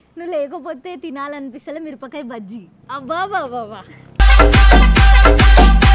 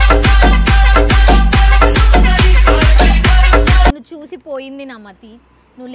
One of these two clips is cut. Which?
second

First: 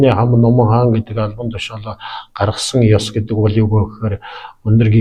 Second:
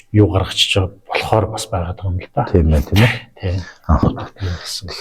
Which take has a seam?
second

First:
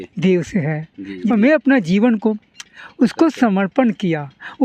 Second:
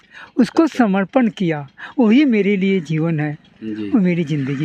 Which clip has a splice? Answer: first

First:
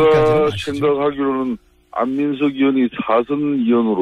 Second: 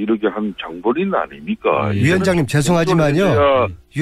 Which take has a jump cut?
first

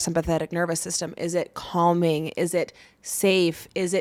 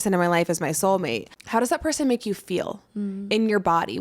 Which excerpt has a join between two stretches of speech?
second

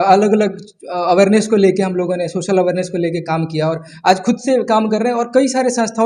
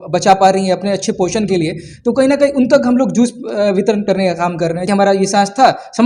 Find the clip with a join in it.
second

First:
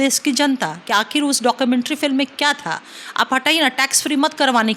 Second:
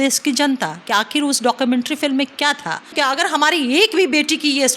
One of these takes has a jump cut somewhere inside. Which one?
second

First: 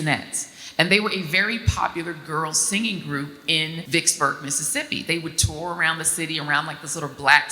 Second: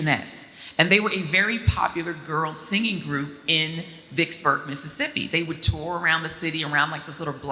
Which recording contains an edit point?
first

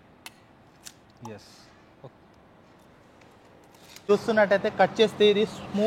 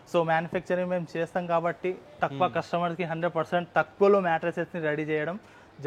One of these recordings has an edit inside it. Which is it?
first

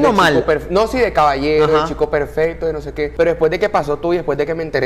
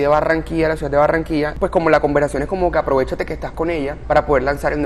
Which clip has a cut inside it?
second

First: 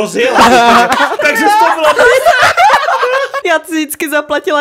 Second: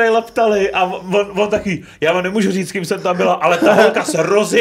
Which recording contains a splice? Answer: first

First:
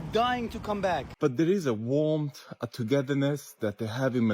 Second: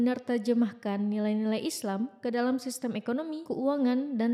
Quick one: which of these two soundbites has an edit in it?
first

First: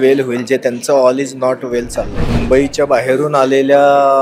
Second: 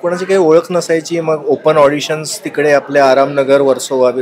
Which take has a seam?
first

